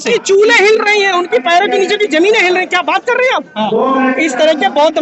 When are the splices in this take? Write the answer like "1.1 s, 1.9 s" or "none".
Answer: none